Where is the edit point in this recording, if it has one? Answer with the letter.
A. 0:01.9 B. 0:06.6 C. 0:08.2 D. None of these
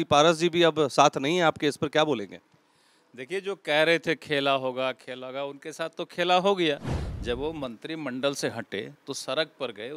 D